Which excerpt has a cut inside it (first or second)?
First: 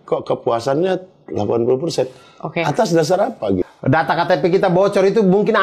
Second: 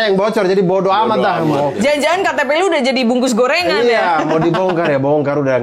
first